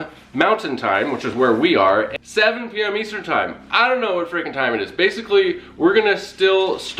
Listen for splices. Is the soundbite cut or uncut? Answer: cut